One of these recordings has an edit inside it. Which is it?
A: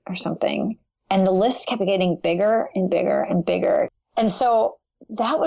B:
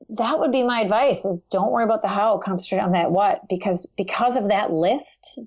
A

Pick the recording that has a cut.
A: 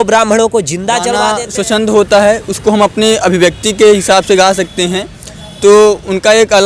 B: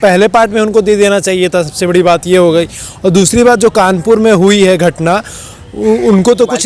A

